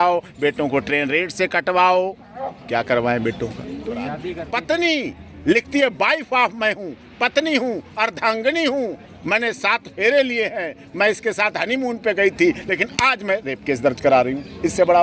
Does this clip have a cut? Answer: yes; 1 cut; at 4.2 s

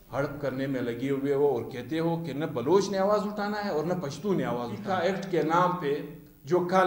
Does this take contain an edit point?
yes; 1 cut; at 4.8 s

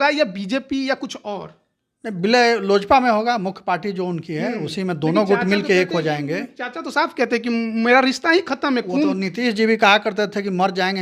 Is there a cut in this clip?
no; 0 cuts

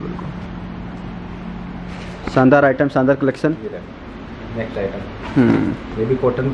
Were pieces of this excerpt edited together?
no; 0 cuts

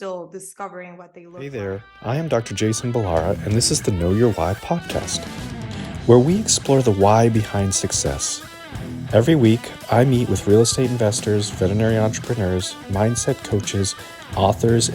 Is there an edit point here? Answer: yes; 1 cut; at 1.4 s

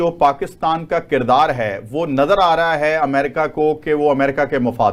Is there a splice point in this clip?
no; 0 cuts

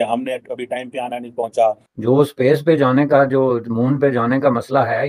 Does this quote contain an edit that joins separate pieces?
yes; 1 cut; at 1.9 s

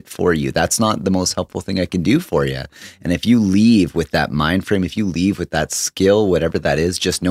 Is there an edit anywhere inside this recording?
no; 0 cuts

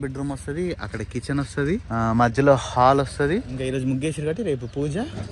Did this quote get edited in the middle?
yes; 2 cuts; at 1.9 s, 3.6 s

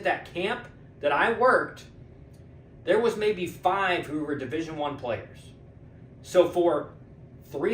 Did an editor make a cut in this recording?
no; 0 cuts

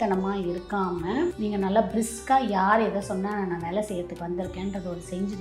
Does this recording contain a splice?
yes; 1 cut; at 1.3 s

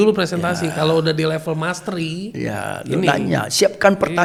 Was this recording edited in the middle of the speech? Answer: no; 0 cuts

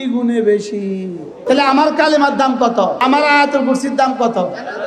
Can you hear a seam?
yes; 2 cuts; at 1.4 s, 3.0 s

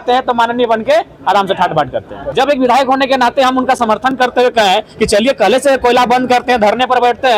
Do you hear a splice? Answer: yes; 1 cut; at 2.2 s

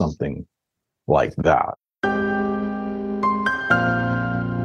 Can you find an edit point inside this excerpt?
yes; 1 cut; at 1.8 s

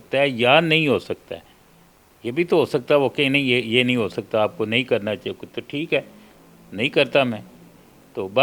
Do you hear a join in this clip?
no; 0 cuts

